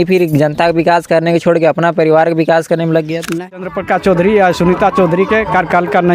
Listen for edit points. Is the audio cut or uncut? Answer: cut